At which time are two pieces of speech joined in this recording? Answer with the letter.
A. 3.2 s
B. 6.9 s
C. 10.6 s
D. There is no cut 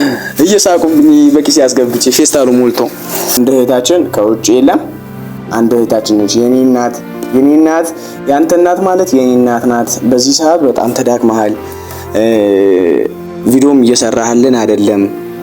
A